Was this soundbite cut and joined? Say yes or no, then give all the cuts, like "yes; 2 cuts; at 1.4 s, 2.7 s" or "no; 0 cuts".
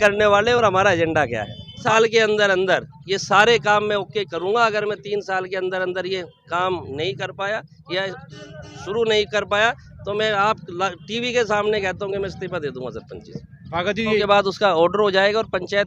yes; 2 cuts; at 1.8 s, 14.2 s